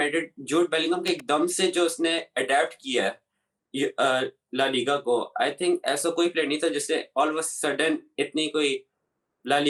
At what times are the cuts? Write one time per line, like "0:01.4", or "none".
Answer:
none